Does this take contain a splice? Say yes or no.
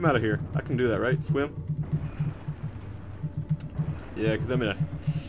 yes